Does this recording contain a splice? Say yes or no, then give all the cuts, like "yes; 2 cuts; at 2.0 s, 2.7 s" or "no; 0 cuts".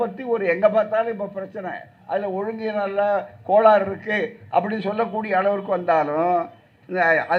no; 0 cuts